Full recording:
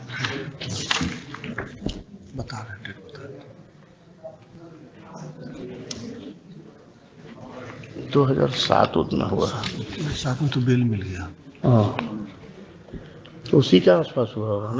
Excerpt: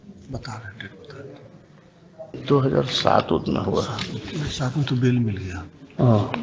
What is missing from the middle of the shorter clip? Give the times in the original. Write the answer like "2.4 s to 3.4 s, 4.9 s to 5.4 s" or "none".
4.4 s to 8.0 s